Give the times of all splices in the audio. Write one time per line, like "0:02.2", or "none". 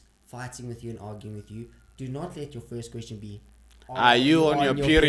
none